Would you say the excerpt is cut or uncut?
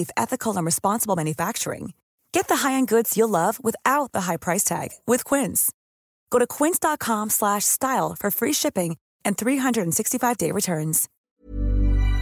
cut